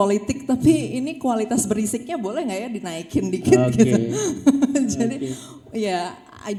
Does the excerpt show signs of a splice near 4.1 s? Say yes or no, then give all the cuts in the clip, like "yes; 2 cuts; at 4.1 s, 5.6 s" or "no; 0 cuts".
no; 0 cuts